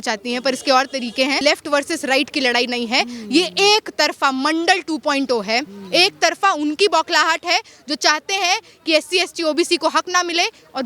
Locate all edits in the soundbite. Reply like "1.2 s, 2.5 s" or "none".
1.4 s